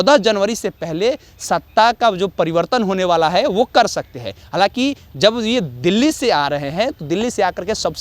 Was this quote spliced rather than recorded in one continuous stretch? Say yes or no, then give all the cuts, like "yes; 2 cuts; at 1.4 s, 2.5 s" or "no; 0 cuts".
no; 0 cuts